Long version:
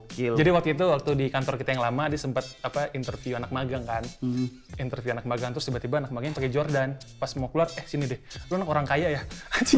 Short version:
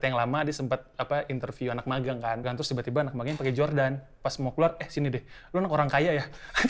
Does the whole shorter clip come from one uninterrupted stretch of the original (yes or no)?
no